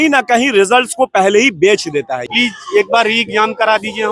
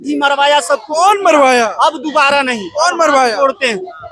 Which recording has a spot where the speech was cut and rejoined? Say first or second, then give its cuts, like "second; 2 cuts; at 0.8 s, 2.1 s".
first; 1 cut; at 2.2 s